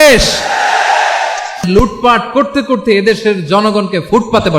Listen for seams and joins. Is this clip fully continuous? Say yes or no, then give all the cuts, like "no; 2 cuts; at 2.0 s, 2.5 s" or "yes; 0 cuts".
no; 1 cut; at 1.7 s